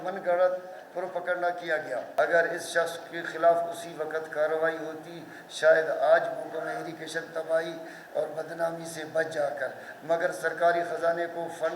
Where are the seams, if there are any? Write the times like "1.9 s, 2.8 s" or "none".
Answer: 2.1 s